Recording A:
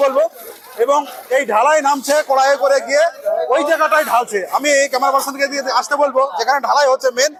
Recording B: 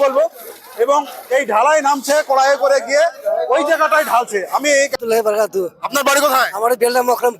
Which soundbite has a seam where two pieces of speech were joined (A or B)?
B